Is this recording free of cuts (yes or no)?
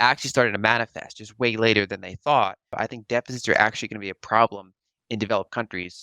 no